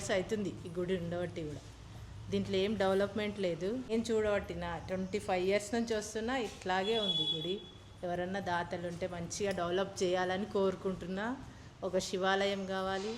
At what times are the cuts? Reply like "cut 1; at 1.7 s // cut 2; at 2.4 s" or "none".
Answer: cut 1; at 3.9 s